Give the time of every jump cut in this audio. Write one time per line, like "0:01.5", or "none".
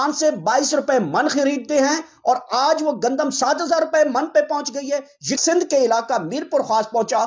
0:05.4